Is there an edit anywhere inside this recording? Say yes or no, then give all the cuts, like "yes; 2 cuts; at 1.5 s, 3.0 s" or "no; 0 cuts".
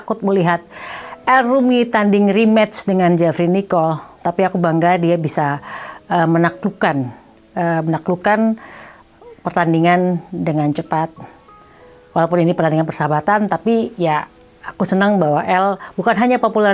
no; 0 cuts